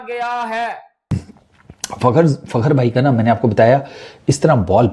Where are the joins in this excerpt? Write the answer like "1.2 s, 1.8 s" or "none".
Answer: 1.1 s